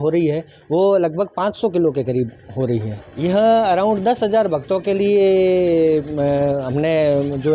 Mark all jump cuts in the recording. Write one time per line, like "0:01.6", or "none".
0:03.0